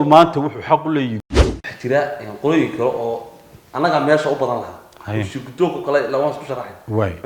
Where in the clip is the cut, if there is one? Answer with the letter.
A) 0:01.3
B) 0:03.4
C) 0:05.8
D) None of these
A